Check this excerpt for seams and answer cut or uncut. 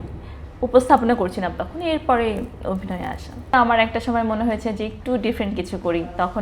cut